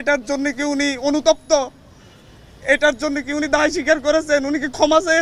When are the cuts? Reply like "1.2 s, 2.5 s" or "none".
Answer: none